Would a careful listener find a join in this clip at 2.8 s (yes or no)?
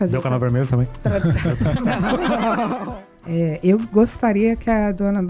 yes